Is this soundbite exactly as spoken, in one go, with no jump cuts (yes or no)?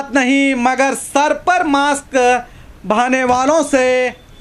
yes